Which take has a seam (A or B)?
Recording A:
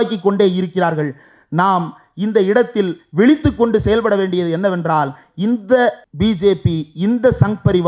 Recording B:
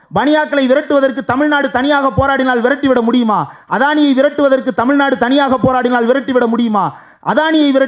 A